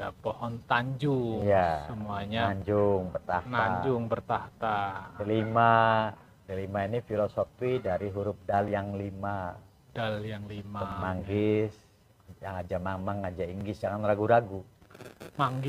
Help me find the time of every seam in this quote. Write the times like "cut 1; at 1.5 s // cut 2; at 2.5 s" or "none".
cut 1; at 10.9 s